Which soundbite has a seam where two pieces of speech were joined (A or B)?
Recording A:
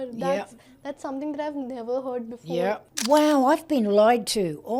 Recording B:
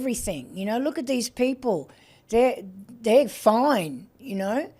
A